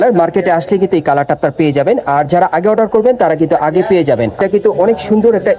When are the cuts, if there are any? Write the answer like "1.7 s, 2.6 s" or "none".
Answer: 4.4 s